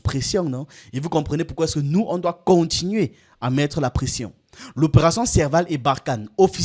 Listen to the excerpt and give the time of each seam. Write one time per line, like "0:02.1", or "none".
none